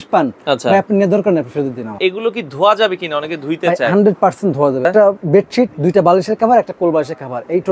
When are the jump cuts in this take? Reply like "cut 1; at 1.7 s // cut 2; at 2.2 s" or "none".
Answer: cut 1; at 2.0 s // cut 2; at 4.9 s